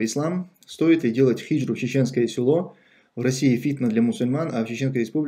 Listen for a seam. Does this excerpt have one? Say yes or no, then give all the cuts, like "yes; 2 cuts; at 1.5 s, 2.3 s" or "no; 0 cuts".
no; 0 cuts